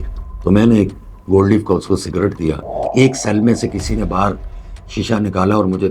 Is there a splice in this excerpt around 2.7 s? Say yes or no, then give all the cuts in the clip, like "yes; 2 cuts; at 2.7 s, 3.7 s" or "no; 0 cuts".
yes; 1 cut; at 2.7 s